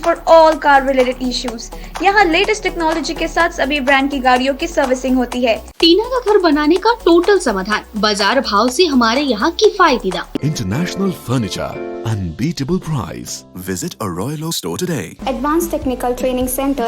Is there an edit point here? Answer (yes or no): yes